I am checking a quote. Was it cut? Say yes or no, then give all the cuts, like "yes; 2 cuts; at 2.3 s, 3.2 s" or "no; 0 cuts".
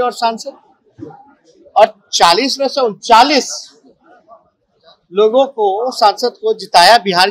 no; 0 cuts